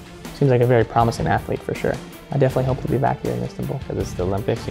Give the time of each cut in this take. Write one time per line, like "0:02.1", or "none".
0:02.2
0:03.8